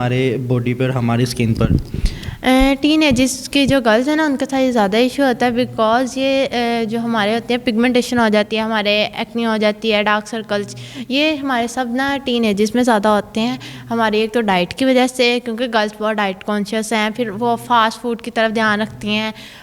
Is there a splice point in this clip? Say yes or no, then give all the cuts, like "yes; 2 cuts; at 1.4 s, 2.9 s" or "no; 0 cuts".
no; 0 cuts